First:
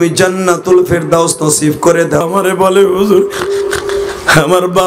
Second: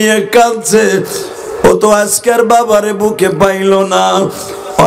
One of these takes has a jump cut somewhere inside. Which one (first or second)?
first